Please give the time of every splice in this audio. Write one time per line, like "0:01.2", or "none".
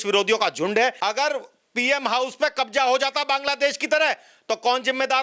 0:01.0